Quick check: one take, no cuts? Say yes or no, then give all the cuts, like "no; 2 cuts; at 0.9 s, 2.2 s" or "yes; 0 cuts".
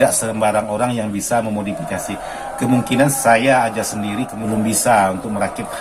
no; 1 cut; at 4.4 s